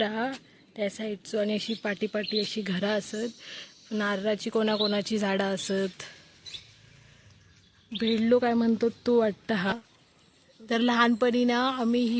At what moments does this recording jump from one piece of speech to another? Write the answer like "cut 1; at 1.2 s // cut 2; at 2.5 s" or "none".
cut 1; at 9.7 s

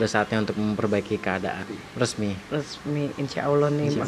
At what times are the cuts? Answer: cut 1; at 1.6 s

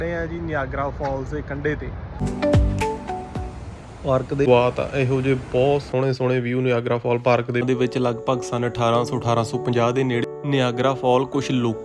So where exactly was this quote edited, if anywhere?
cut 1; at 2.2 s // cut 2; at 4.5 s // cut 3; at 7.6 s

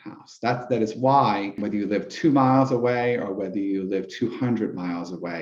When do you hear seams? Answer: cut 1; at 1.6 s

